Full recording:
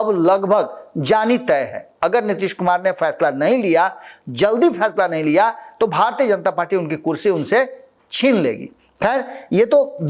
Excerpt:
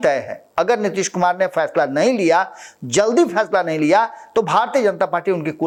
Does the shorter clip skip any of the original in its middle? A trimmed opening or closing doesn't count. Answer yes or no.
no